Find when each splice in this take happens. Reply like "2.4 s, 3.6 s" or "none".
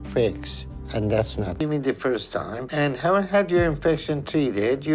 1.6 s